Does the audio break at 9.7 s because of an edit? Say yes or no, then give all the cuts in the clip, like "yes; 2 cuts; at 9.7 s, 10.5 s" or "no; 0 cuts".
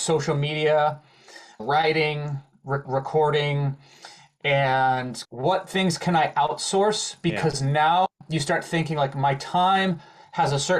no; 3 cuts; at 1.6 s, 2.9 s, 5.1 s